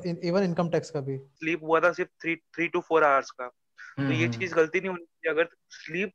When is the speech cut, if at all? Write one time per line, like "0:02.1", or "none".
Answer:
0:01.3